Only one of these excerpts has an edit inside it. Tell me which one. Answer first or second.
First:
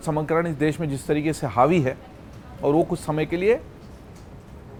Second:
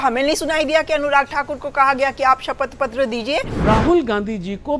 second